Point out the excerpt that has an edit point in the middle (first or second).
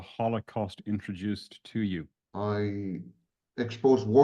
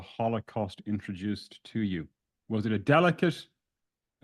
first